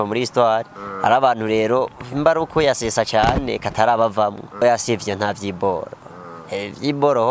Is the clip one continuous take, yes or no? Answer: no